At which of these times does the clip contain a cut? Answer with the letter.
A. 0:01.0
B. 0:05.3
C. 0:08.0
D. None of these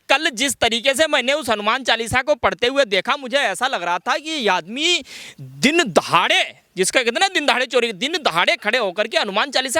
D